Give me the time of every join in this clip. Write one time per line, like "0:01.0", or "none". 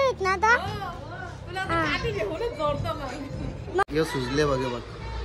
0:03.8